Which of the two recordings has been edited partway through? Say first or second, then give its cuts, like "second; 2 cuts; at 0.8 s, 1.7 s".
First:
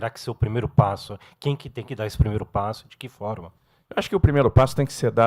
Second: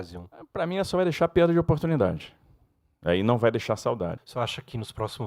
second; 1 cut; at 4.2 s